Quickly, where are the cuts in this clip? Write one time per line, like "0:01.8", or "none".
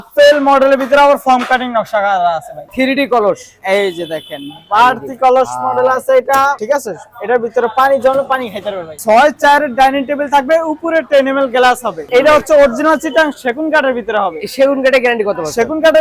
0:02.6
0:09.0
0:12.0